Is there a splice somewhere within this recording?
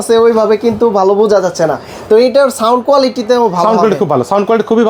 no; 0 cuts

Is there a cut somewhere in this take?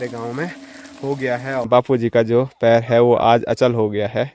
yes; 1 cut; at 1.7 s

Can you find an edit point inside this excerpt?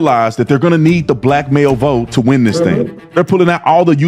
yes; 1 cut; at 3.1 s

